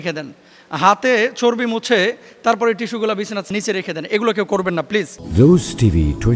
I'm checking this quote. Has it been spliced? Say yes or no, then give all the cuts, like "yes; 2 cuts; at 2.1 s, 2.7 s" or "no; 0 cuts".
yes; 2 cuts; at 3.5 s, 5.2 s